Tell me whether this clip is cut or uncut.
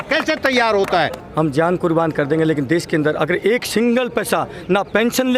cut